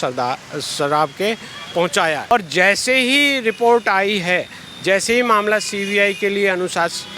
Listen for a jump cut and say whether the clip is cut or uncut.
cut